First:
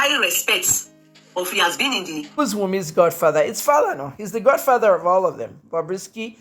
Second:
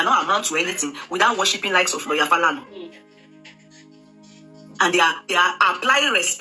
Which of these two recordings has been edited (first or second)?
first